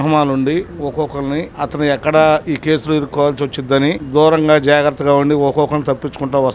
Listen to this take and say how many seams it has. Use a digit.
0